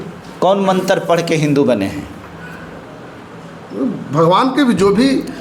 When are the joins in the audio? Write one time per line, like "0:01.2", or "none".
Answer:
none